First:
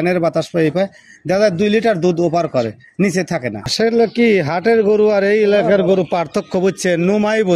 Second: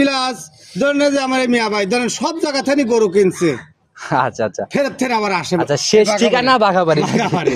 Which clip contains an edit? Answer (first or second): first